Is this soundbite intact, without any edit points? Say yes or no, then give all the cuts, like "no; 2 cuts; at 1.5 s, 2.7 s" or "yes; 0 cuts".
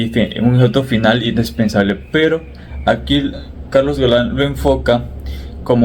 yes; 0 cuts